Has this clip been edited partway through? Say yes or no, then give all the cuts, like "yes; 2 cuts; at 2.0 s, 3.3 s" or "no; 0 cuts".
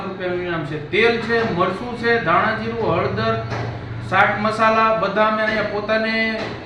no; 0 cuts